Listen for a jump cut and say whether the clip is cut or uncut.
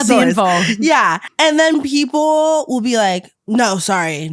cut